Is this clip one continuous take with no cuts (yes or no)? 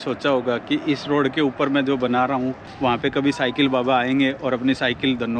no